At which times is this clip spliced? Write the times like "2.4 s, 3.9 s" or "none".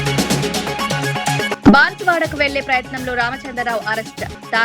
1.5 s